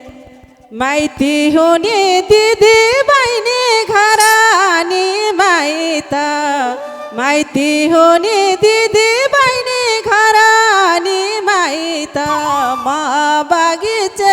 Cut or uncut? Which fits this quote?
uncut